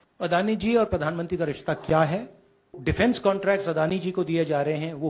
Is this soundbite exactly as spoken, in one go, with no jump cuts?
no; 1 cut; at 2.8 s

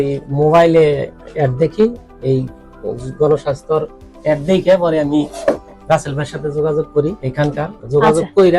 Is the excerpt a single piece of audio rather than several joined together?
yes; 0 cuts

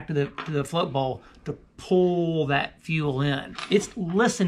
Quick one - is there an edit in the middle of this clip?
yes; 1 cut; at 3.5 s

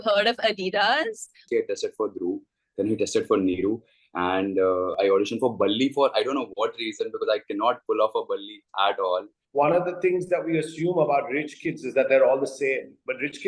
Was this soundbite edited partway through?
yes; 3 cuts; at 1.4 s, 5.0 s, 9.3 s

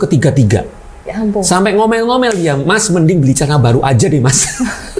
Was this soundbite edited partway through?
no; 0 cuts

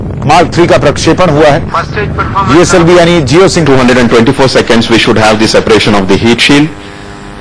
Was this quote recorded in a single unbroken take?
yes; 0 cuts

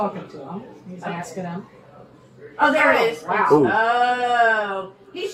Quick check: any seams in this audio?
no; 0 cuts

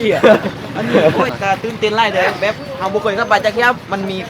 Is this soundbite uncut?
no; 1 cut; at 1.3 s

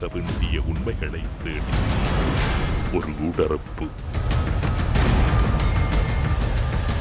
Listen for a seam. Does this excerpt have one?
no; 0 cuts

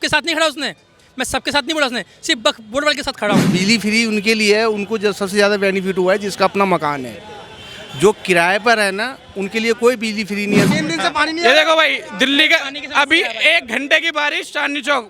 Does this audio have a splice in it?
yes; 2 cuts; at 3.4 s, 10.7 s

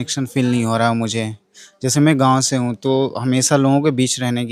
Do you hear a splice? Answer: no; 0 cuts

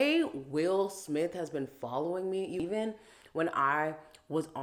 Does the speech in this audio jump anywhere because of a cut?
no; 0 cuts

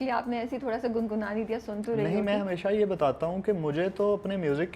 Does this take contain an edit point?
no; 0 cuts

